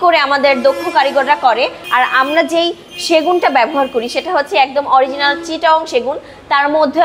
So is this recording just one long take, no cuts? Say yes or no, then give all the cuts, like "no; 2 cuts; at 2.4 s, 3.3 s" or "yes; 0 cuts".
no; 1 cut; at 1.8 s